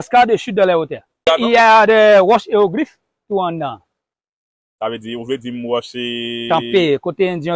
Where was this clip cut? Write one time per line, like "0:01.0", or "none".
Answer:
0:01.3